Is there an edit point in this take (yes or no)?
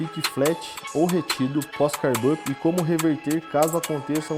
no